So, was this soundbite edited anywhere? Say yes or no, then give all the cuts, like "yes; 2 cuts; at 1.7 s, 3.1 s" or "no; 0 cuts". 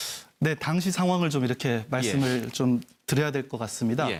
no; 0 cuts